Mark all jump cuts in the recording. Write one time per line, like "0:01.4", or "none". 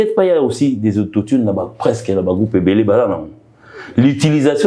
none